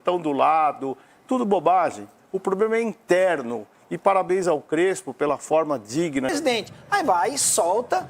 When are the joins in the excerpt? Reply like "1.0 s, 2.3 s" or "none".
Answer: 6.3 s